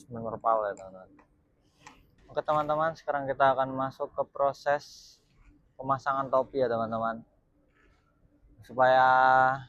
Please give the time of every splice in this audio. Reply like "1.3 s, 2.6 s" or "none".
2.1 s